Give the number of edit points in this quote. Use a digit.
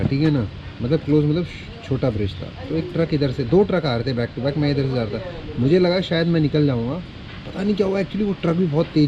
0